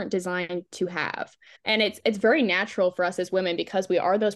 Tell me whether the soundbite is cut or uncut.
uncut